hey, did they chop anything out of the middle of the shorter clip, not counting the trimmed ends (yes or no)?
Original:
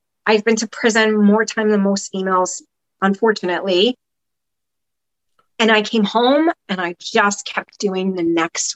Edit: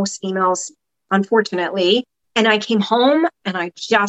yes